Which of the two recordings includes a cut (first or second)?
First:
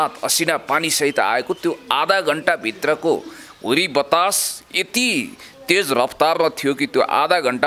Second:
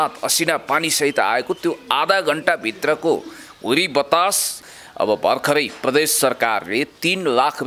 second